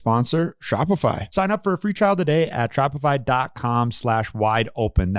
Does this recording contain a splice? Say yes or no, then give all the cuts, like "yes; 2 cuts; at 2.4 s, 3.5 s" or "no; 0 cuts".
yes; 1 cut; at 1.2 s